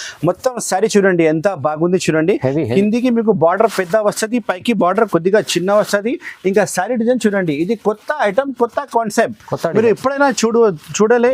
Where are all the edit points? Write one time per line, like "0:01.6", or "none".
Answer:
none